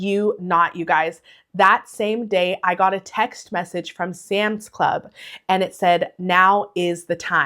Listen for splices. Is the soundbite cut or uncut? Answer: uncut